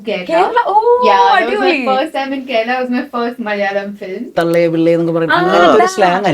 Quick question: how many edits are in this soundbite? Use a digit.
1